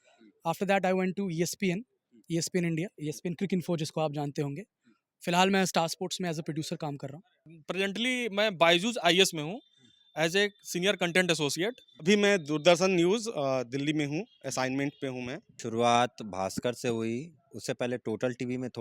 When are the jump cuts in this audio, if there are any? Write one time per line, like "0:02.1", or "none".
0:07.5
0:12.0
0:15.5